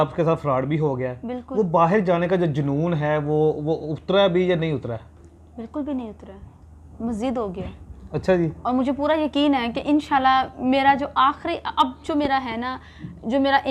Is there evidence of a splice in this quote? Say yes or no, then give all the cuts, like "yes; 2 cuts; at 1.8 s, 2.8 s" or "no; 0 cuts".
no; 0 cuts